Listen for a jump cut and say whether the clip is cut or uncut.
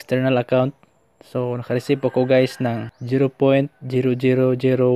cut